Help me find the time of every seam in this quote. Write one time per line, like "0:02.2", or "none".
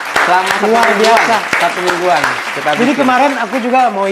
none